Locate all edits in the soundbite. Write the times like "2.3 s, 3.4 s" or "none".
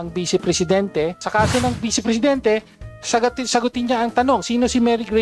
1.2 s